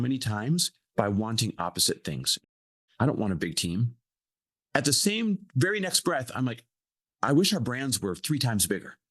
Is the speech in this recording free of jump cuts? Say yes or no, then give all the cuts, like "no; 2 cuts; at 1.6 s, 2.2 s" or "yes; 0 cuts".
no; 1 cut; at 2.4 s